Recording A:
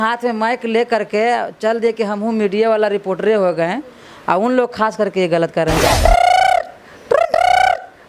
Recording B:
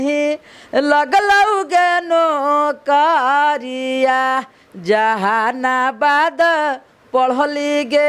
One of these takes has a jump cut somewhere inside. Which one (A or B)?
A